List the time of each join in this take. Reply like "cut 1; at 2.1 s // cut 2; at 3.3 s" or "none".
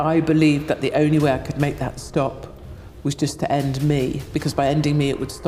none